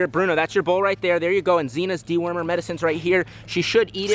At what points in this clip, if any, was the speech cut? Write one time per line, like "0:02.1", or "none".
none